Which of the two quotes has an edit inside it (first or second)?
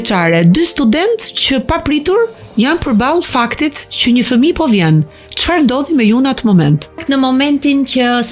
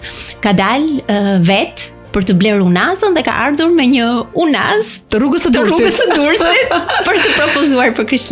first